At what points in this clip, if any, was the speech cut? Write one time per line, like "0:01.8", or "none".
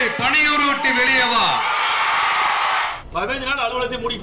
0:02.9